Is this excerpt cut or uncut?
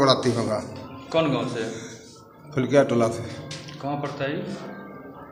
uncut